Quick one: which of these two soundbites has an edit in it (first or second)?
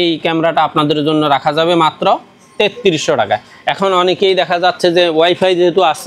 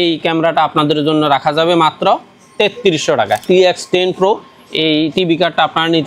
second